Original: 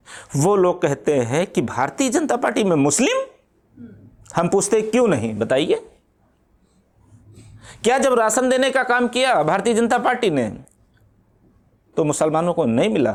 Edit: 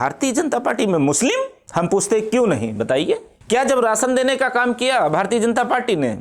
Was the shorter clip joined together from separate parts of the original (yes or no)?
yes